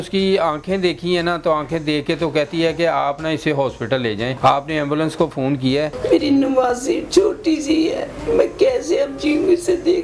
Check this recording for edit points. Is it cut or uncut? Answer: cut